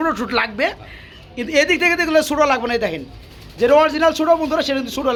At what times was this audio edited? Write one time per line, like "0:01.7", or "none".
none